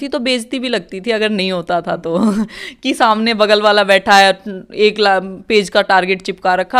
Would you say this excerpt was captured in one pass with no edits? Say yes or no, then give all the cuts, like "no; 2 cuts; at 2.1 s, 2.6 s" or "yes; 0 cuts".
yes; 0 cuts